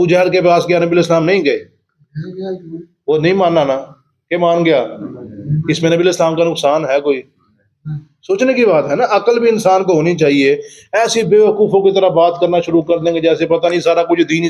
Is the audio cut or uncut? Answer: uncut